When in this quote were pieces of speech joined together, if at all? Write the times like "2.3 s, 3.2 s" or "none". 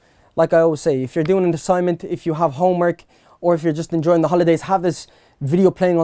none